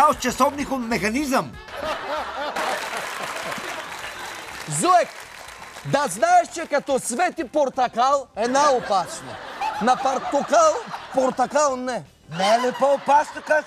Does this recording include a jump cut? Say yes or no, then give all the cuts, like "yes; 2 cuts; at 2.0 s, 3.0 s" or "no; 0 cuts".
no; 0 cuts